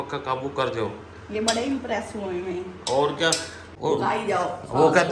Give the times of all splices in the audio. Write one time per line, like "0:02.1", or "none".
0:03.6